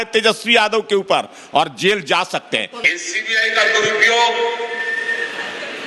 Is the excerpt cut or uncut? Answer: cut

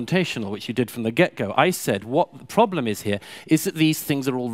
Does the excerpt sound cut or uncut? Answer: uncut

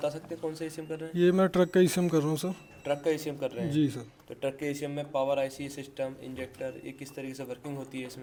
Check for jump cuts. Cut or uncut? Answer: uncut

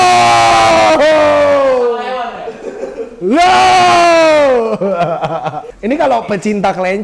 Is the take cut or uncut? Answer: uncut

